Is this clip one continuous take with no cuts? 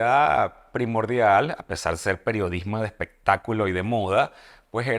yes; 0 cuts

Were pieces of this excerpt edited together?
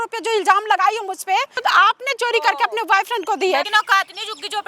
yes; 2 cuts; at 1.6 s, 3.7 s

